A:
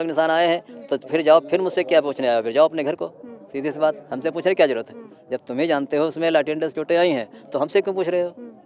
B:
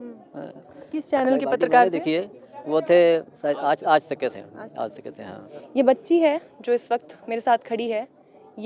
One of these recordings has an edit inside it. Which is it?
B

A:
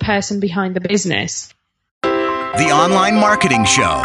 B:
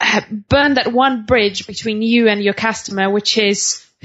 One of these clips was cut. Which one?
A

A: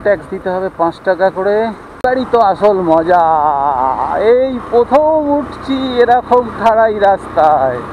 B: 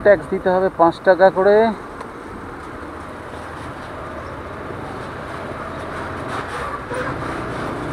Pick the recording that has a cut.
A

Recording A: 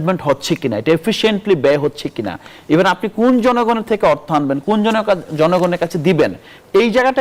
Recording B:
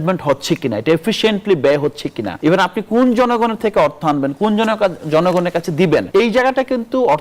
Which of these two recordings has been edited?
B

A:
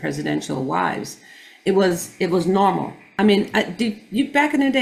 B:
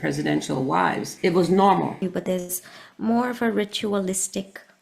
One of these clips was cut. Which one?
B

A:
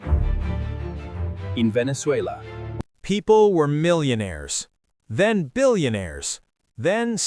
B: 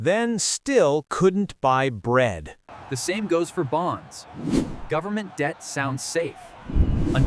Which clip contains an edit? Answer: B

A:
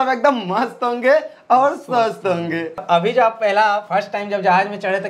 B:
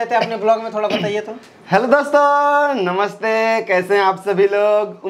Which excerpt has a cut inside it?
A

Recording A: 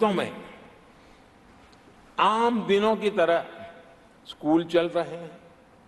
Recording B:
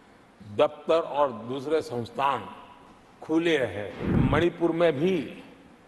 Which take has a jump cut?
B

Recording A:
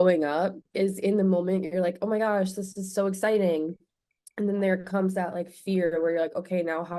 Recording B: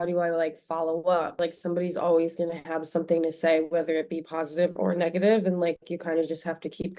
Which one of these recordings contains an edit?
B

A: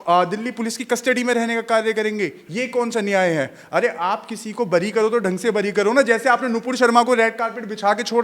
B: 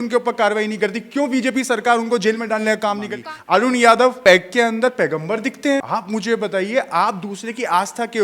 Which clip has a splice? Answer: B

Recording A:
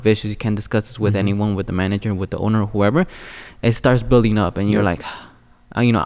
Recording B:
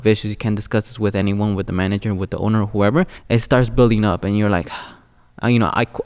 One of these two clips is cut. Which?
B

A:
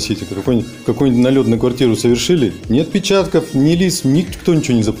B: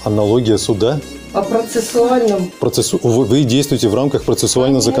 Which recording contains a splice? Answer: B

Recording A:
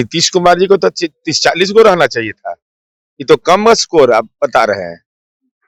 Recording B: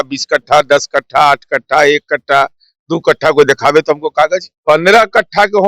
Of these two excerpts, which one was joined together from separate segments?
B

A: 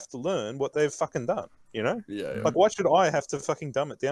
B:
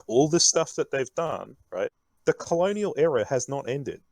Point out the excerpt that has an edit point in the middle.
B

